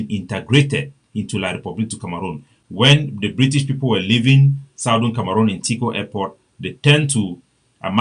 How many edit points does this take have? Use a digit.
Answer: 1